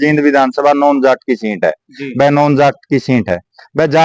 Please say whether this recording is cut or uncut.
uncut